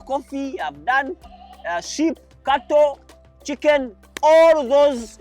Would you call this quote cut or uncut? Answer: cut